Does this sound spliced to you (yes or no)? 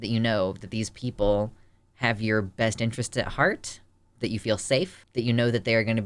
no